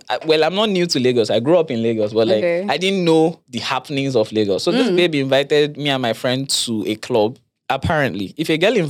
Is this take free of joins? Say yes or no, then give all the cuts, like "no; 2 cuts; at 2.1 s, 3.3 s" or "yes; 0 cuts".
no; 1 cut; at 7.6 s